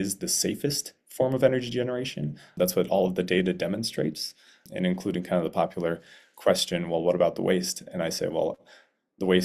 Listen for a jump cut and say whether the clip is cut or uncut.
cut